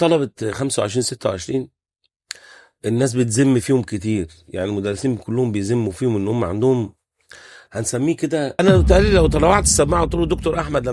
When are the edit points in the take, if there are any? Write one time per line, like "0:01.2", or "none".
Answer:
0:08.5